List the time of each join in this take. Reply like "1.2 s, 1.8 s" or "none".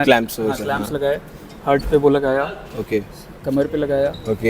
none